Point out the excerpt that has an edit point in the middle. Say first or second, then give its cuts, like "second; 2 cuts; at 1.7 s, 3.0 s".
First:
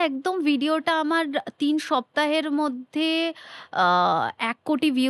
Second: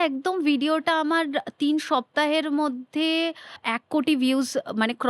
second; 1 cut; at 3.6 s